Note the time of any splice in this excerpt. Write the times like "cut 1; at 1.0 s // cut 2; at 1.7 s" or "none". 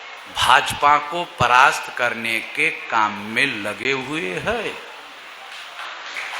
none